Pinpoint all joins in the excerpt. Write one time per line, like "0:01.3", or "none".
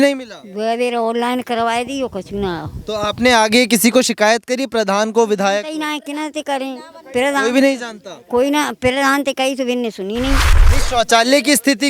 0:10.5